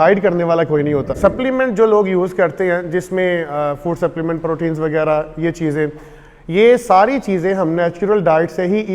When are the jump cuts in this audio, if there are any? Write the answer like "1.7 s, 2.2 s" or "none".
1.1 s